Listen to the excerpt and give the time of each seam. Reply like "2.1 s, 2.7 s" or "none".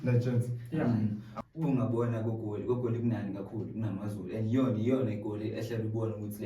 1.3 s